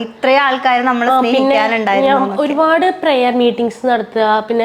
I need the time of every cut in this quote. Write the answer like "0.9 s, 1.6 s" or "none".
none